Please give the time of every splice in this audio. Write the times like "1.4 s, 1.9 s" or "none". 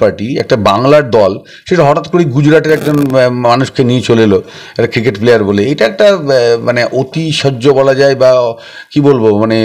none